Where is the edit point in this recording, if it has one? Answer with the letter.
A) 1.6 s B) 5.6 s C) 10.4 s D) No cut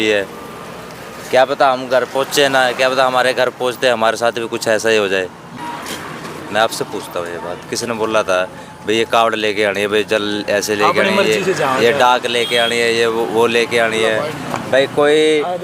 B